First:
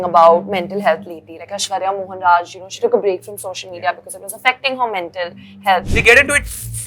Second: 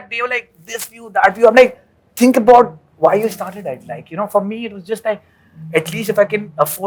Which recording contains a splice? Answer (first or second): first